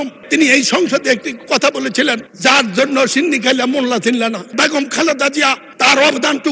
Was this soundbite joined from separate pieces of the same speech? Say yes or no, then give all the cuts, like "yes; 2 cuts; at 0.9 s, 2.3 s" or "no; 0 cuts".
yes; 1 cut; at 4.5 s